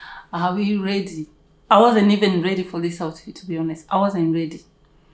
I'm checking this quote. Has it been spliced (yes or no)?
no